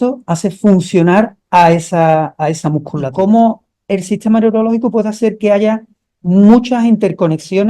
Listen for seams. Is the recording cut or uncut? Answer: cut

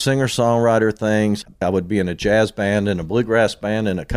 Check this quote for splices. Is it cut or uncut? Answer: cut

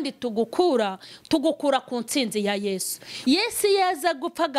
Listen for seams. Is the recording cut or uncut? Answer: cut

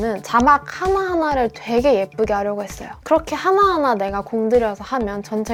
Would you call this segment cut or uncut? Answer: uncut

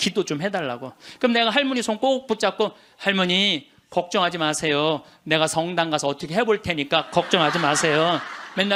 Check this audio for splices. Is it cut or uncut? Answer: uncut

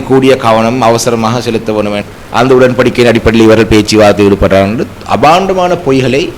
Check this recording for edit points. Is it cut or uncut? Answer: cut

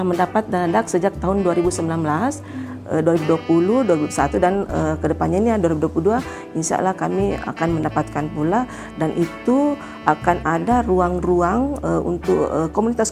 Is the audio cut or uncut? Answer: uncut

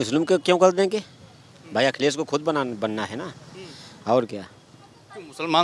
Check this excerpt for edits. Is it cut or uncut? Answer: uncut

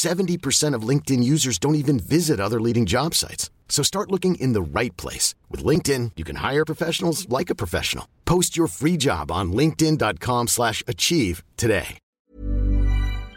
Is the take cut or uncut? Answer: cut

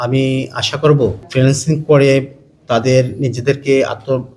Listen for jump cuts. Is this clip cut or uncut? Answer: cut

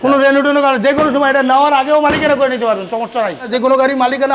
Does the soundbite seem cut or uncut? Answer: cut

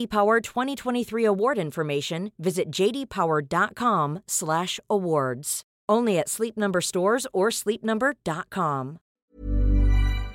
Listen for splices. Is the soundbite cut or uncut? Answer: cut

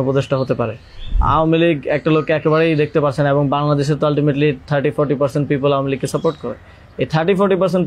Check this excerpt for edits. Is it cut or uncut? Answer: cut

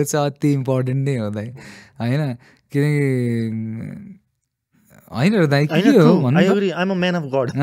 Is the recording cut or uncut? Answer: uncut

